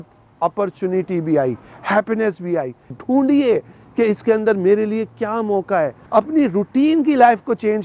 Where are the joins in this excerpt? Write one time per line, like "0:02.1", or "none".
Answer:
0:02.9
0:06.0

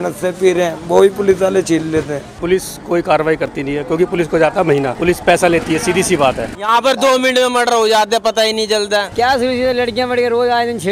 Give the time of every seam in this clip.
0:02.4
0:06.5
0:09.1

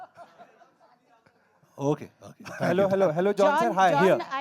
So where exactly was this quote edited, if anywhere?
none

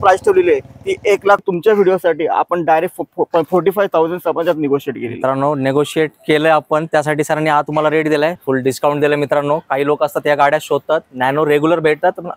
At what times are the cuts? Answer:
0:01.4
0:08.4

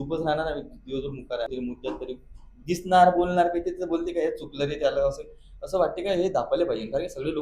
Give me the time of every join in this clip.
0:01.5

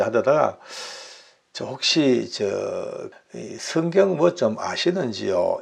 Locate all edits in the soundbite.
0:03.1

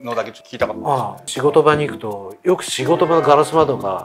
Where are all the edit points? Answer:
0:01.2

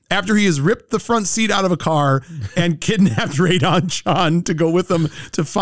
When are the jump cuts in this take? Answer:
none

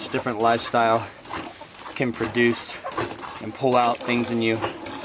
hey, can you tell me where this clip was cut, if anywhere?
none

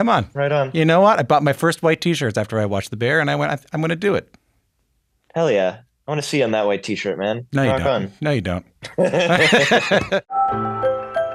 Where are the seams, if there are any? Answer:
0:10.3

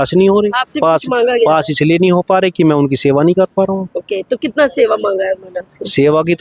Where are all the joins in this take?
none

